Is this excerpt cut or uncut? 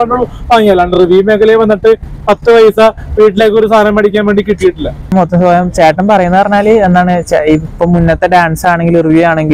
cut